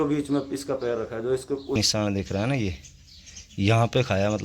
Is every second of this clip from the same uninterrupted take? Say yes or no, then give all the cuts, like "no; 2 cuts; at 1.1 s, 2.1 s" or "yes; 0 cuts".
no; 1 cut; at 1.8 s